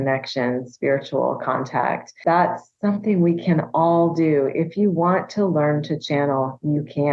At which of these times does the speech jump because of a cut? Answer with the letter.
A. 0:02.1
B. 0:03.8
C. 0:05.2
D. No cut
A